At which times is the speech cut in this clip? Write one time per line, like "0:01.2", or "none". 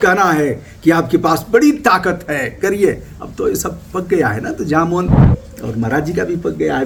none